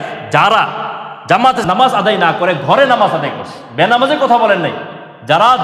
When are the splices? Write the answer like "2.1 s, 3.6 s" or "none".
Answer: 1.6 s